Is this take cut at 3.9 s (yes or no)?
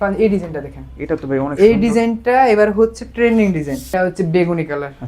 yes